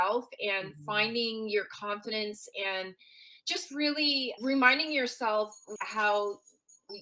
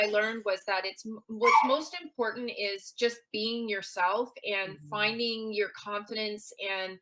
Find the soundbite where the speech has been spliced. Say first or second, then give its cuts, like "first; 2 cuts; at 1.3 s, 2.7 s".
first; 1 cut; at 5.7 s